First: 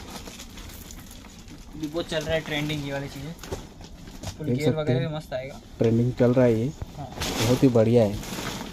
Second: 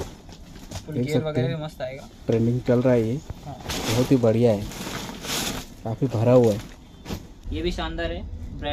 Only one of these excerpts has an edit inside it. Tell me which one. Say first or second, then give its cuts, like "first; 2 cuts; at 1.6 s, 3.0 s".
second; 1 cut; at 7.3 s